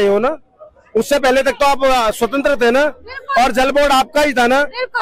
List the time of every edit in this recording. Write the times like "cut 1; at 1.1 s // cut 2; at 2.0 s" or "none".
none